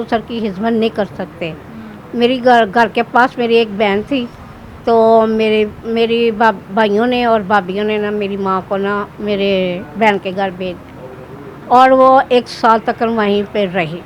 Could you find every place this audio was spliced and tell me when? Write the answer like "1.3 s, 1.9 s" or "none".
none